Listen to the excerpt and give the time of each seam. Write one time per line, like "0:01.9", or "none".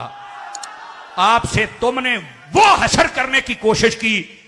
none

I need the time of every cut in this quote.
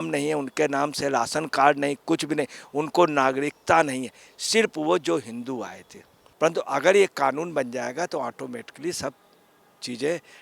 0:06.2

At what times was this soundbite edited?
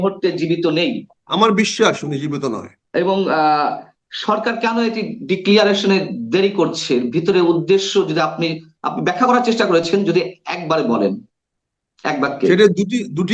0:01.1
0:02.7

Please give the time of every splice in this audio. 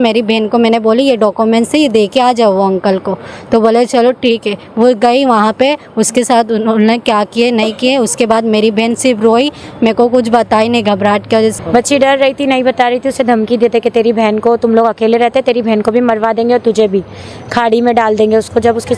0:11.5

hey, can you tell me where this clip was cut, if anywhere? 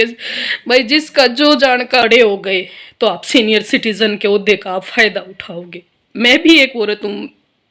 0:02.0

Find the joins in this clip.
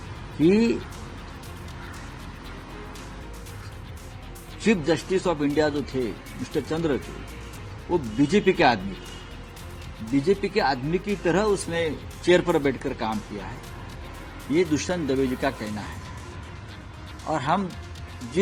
none

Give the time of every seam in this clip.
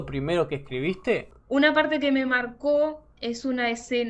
0:01.3

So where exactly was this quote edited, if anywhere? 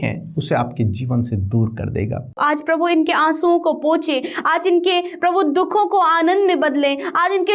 0:02.4

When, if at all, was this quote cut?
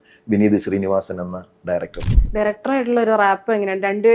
0:02.0

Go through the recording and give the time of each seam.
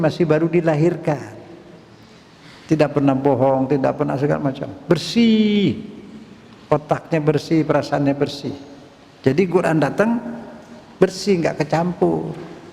none

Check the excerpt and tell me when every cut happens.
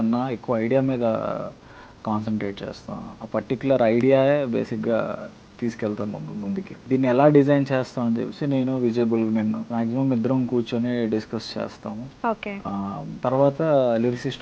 0:06.8
0:09.6
0:13.1

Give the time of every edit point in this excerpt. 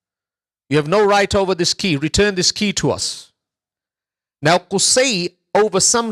none

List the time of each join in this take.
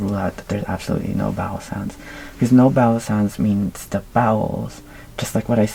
none

